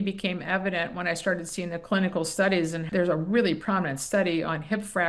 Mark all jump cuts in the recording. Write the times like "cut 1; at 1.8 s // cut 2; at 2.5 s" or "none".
cut 1; at 2.8 s